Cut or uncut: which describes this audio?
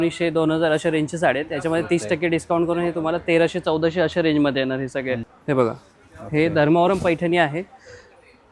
cut